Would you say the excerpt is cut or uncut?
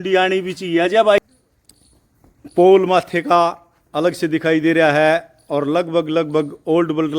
cut